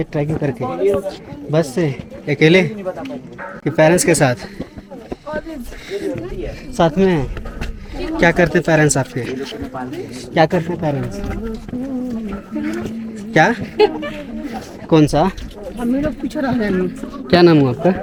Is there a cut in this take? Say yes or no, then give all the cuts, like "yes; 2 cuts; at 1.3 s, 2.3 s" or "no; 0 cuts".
no; 0 cuts